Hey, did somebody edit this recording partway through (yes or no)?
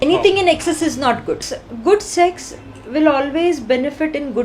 yes